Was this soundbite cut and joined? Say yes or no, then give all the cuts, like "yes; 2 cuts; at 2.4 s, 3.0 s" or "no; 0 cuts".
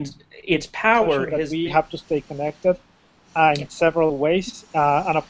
yes; 1 cut; at 1.4 s